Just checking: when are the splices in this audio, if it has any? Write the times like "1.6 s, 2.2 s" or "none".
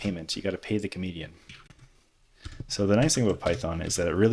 1.7 s